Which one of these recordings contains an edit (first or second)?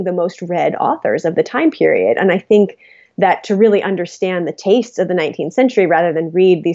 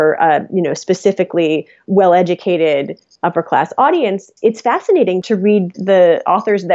second